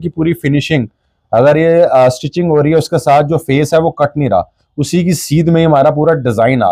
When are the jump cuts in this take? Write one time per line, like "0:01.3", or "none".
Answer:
none